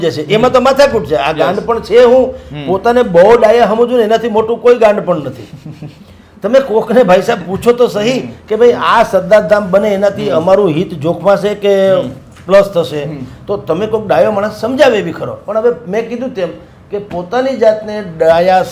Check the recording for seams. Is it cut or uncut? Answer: uncut